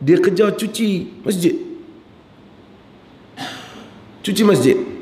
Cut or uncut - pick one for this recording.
uncut